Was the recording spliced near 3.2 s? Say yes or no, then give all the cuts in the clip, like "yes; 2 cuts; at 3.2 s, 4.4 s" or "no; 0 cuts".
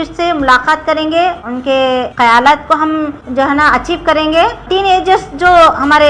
yes; 3 cuts; at 1.8 s, 3.2 s, 4.6 s